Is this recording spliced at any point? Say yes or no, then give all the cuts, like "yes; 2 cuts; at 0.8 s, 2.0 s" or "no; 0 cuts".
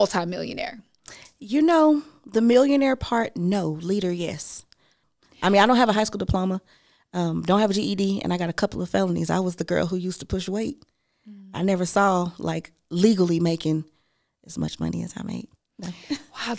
yes; 1 cut; at 5.0 s